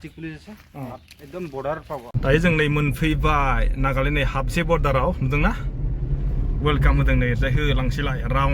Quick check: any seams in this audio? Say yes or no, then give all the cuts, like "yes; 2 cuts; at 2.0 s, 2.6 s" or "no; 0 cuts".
yes; 1 cut; at 2.1 s